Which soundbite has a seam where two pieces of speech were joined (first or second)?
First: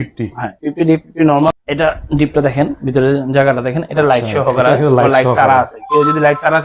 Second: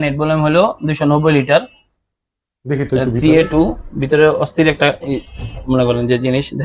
first